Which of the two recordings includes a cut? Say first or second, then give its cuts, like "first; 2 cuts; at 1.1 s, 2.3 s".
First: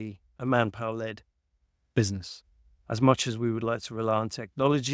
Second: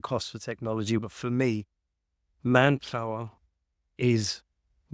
second; 1 cut; at 1.0 s